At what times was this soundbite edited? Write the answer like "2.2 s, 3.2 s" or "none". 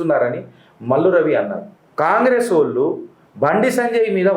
none